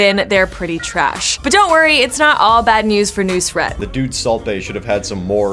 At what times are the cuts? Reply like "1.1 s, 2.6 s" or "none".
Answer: 1.3 s, 3.7 s